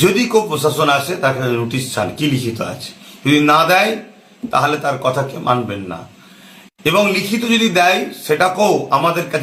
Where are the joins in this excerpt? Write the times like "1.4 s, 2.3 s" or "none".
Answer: none